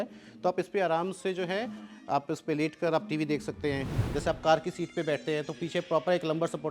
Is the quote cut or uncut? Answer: cut